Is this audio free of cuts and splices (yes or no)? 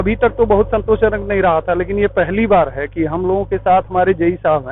yes